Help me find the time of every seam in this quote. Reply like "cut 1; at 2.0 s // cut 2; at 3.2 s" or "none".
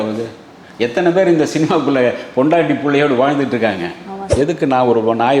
cut 1; at 4.3 s

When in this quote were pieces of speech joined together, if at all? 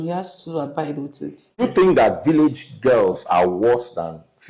cut 1; at 1.6 s

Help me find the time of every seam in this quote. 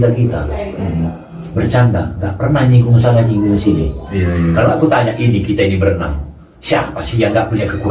none

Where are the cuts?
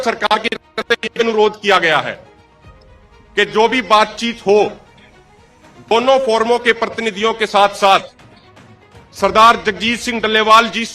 none

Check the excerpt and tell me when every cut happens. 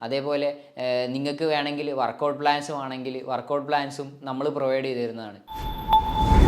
cut 1; at 5.5 s

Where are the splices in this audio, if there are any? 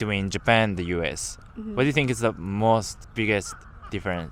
cut 1; at 3.3 s

